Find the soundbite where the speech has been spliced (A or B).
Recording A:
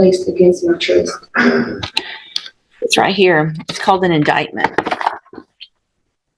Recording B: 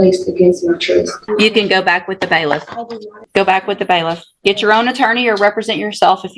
B